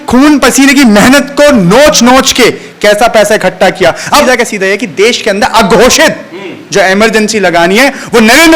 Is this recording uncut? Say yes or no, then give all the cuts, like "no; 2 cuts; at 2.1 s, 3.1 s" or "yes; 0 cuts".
no; 1 cut; at 4.2 s